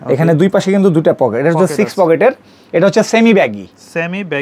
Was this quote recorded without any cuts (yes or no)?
yes